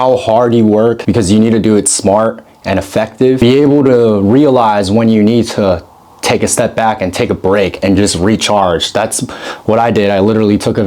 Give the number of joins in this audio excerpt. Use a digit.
2